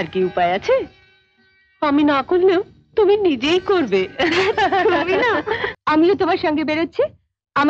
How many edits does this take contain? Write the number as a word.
one